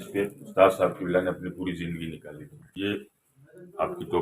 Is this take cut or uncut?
cut